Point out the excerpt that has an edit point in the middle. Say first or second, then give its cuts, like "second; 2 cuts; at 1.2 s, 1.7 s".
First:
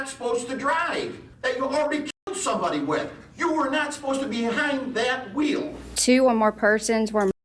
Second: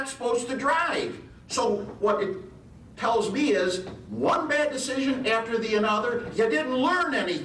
first; 2 cuts; at 1.3 s, 5.8 s